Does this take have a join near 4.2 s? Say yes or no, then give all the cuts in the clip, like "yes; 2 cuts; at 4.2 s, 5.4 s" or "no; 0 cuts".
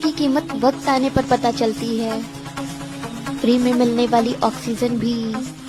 no; 0 cuts